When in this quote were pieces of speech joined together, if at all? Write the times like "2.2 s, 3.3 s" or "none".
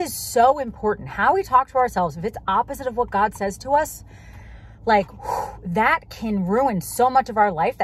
none

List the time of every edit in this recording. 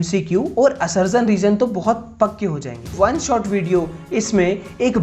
2.9 s

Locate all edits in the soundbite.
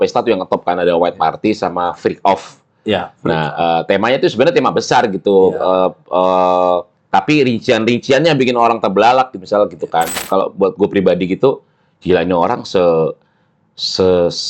10.2 s

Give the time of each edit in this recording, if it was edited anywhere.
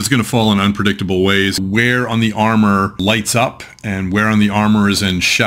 1.6 s, 3.0 s

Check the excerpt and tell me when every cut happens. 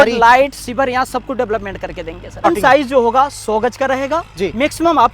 2.4 s

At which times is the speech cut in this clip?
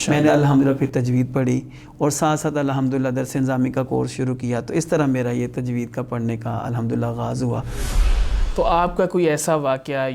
8.1 s

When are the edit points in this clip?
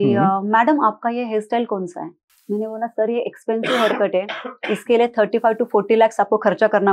2.3 s

